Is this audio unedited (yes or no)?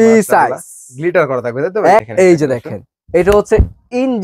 no